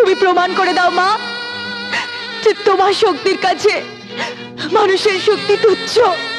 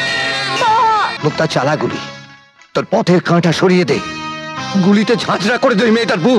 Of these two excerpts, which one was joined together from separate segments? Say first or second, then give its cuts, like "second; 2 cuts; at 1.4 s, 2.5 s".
second; 1 cut; at 1.2 s